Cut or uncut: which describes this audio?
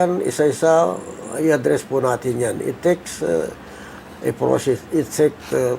uncut